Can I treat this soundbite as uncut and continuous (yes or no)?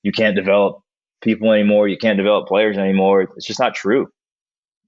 yes